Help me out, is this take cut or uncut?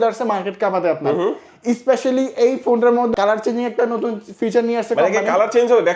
uncut